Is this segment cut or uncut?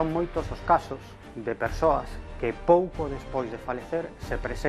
uncut